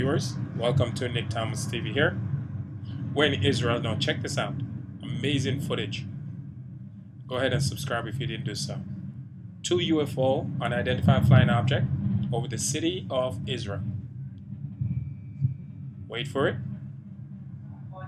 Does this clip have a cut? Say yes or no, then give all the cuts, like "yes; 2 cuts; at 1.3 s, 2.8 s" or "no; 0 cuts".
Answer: yes; 2 cuts; at 2.8 s, 16.8 s